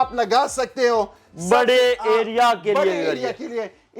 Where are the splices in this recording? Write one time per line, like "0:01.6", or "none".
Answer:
none